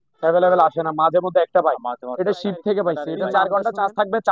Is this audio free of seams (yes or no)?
no